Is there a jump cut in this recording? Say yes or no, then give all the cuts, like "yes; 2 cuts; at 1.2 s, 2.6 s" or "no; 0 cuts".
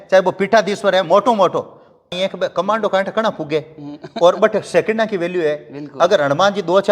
yes; 1 cut; at 2.2 s